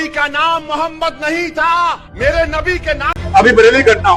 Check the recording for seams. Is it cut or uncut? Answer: cut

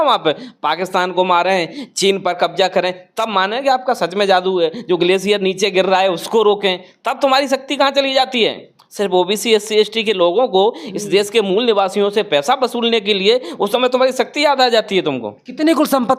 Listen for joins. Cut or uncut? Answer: uncut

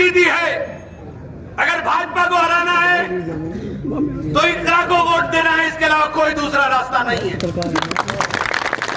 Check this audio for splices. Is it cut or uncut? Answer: uncut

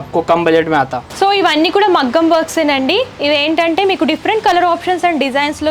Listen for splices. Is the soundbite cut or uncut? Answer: cut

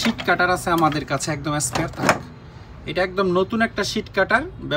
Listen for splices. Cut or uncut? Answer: uncut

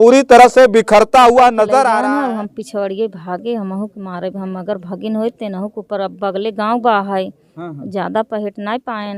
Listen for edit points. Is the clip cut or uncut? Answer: cut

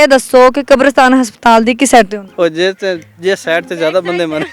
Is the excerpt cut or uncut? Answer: cut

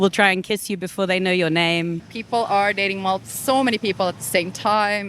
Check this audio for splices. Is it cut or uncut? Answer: cut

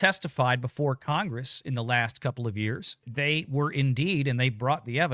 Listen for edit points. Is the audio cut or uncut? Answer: cut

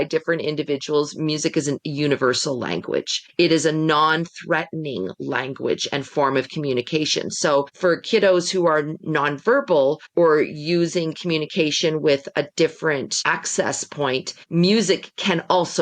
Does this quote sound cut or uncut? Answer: cut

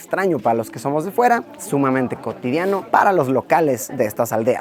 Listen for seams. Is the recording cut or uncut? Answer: uncut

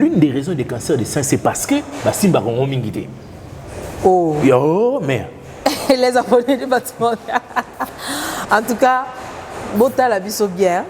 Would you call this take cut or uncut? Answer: uncut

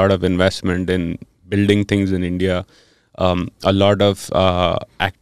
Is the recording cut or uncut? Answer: uncut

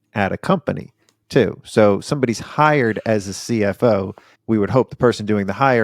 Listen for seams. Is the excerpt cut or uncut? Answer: uncut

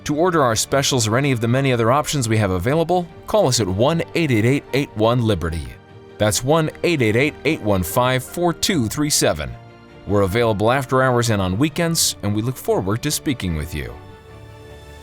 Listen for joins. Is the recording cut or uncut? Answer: cut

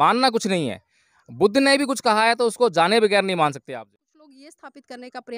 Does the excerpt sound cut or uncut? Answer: cut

